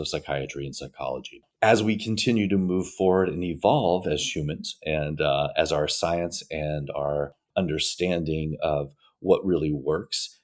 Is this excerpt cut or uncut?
uncut